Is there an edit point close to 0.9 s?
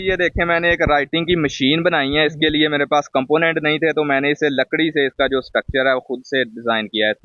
no; 0 cuts

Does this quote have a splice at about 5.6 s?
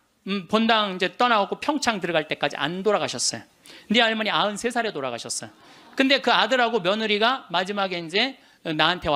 no; 0 cuts

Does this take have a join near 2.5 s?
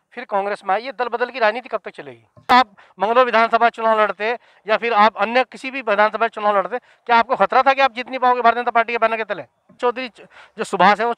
yes; 2 cuts; at 2.5 s, 9.8 s

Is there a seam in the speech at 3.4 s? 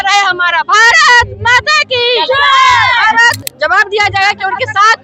yes; 1 cut; at 3.4 s

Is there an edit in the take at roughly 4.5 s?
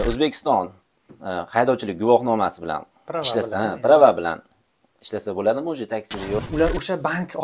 no; 1 cut; at 6.4 s

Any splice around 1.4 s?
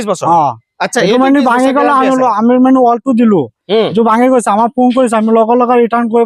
no; 0 cuts

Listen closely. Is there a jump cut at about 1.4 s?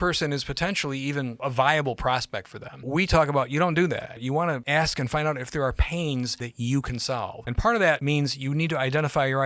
yes; 6 cuts; at 1.4 s, 2.9 s, 4.3 s, 6.4 s, 7.4 s, 8.0 s

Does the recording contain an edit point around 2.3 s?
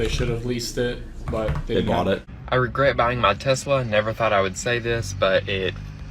yes; 1 cut; at 2.3 s

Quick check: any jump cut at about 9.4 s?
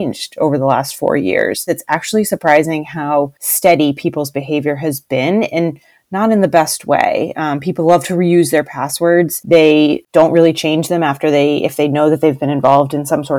yes; 4 cuts; at 1.8 s, 3.4 s, 9.4 s, 10.0 s

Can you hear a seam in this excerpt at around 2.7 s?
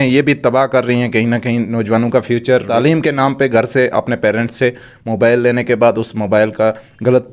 yes; 1 cut; at 2.7 s

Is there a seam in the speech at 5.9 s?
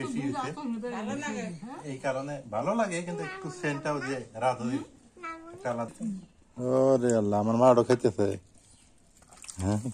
yes; 1 cut; at 5.9 s

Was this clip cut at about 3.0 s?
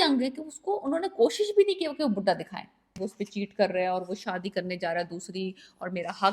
yes; 1 cut; at 3.0 s

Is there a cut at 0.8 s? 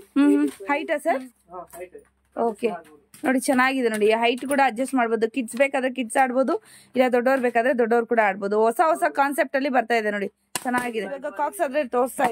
yes; 2 cuts; at 0.8 s, 11.3 s

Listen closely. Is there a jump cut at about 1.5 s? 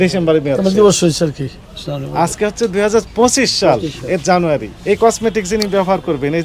no; 1 cut; at 4.7 s

